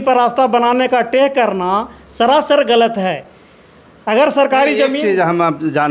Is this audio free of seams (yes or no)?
yes